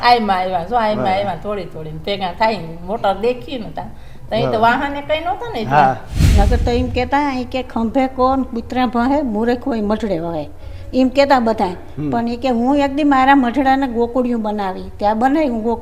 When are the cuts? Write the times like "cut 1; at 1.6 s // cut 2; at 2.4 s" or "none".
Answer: cut 1; at 6.2 s